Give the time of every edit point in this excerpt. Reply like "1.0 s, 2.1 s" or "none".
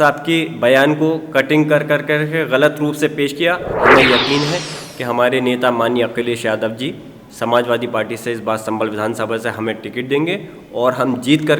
3.7 s